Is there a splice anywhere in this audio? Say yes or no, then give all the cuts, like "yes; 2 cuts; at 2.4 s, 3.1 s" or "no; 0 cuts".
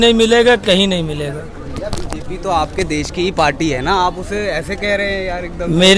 no; 0 cuts